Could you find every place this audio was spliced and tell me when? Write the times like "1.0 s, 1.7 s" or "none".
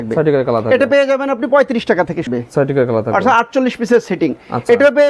2.2 s